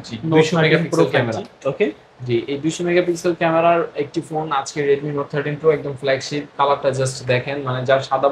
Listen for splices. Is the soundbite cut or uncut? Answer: uncut